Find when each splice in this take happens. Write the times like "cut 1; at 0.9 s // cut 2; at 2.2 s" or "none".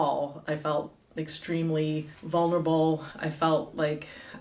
cut 1; at 2.1 s // cut 2; at 3.1 s